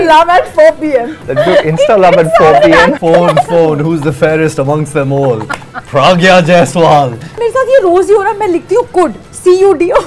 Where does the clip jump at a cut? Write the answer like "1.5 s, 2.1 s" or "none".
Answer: 1.2 s, 3.0 s, 7.4 s